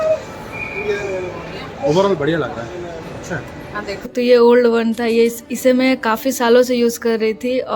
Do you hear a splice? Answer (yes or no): yes